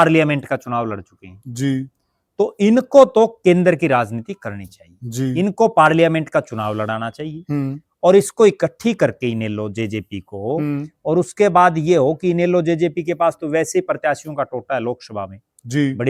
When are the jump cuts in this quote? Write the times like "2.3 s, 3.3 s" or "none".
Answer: none